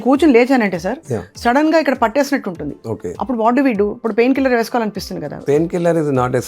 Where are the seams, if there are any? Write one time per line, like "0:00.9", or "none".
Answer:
0:03.1
0:05.4